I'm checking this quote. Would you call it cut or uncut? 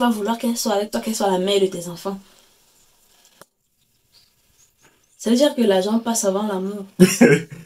uncut